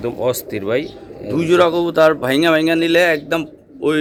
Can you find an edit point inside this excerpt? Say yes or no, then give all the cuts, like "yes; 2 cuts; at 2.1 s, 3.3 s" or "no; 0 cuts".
no; 0 cuts